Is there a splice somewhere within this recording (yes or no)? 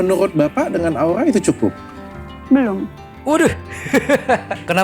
no